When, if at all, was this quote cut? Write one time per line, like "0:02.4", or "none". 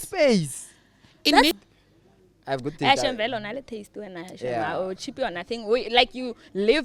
0:01.5